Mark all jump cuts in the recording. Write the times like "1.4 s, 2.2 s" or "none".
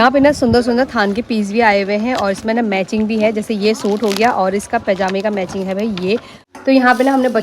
6.4 s